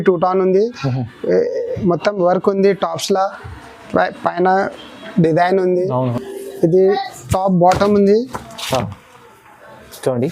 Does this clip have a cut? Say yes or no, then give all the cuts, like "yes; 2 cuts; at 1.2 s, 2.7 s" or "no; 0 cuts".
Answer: yes; 1 cut; at 6.1 s